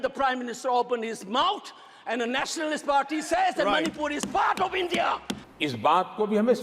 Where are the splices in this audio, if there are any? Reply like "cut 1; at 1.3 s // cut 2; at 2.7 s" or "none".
cut 1; at 5.4 s